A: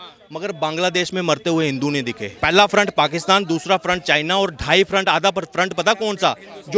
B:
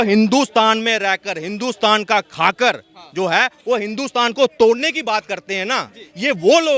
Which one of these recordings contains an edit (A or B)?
A